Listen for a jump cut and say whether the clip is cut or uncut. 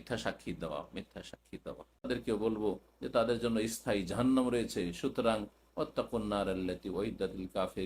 cut